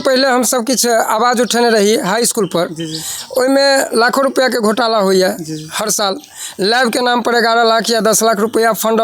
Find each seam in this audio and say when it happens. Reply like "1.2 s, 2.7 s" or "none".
none